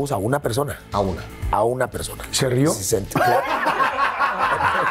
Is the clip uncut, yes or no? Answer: yes